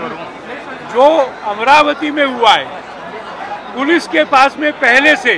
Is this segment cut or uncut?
uncut